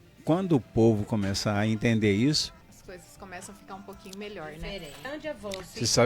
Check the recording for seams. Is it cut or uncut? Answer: cut